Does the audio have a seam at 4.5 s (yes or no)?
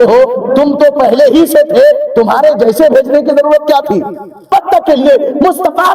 yes